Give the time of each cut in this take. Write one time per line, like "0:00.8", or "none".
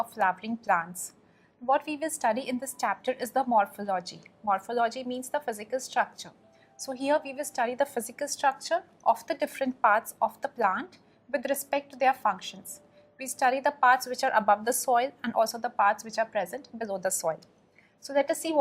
0:08.1